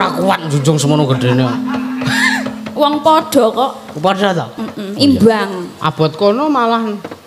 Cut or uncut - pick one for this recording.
uncut